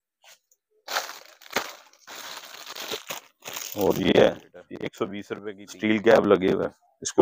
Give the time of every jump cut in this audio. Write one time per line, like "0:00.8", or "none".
0:05.2